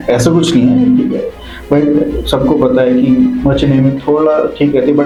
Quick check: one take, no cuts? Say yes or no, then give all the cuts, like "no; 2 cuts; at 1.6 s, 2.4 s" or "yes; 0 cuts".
yes; 0 cuts